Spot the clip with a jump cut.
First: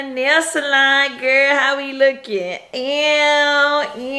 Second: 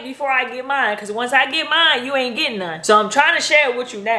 second; 1 cut; at 2.7 s

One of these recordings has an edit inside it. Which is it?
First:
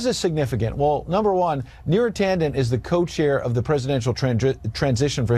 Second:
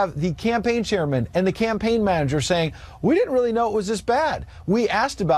first; 1 cut; at 1.6 s

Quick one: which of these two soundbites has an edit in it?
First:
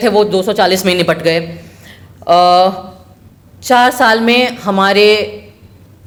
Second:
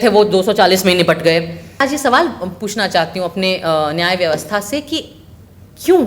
second; 1 cut; at 1.8 s

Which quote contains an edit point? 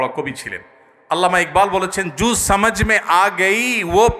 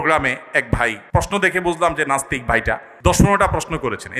second; 2 cuts; at 1.0 s, 2.9 s

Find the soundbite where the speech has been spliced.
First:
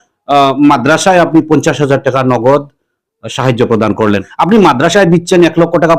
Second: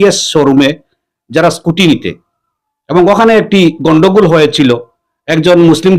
first; 1 cut; at 4.2 s

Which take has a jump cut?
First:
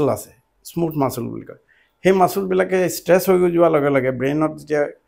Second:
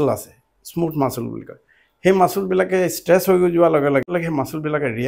second; 1 cut; at 4.1 s

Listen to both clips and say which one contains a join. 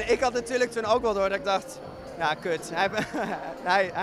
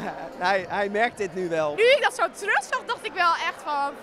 second; 1 cut; at 1.7 s

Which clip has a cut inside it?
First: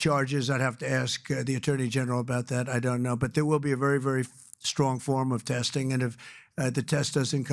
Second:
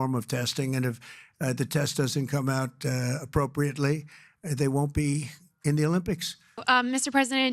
second; 1 cut; at 6.6 s

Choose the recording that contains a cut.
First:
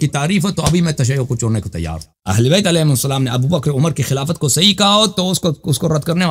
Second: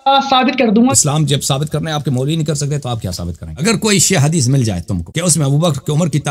second; 3 cuts; at 0.9 s, 3.4 s, 5.0 s

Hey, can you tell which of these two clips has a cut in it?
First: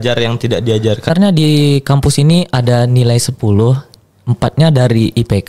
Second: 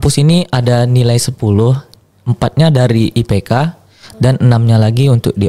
first; 1 cut; at 1.1 s

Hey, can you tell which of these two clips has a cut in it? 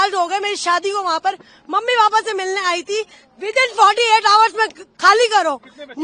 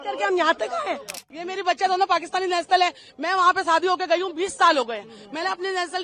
second; 1 cut; at 1.3 s

